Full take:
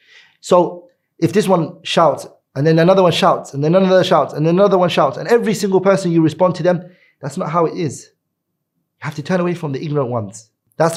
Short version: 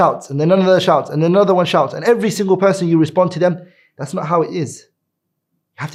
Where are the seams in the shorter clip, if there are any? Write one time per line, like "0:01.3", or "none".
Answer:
none